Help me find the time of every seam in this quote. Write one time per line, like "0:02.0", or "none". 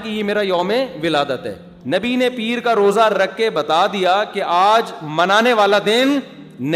0:01.7